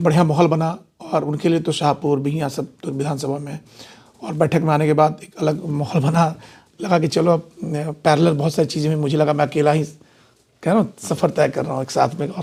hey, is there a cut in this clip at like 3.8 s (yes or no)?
no